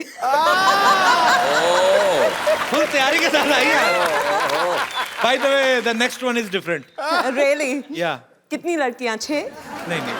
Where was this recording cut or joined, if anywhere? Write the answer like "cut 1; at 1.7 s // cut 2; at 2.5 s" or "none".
none